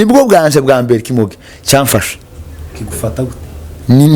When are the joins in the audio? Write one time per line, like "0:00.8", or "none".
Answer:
none